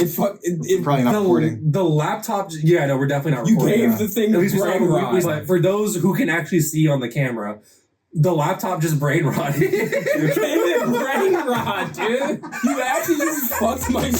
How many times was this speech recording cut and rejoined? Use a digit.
3